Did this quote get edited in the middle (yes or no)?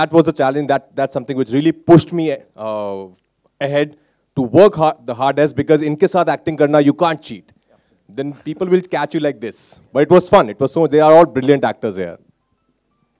no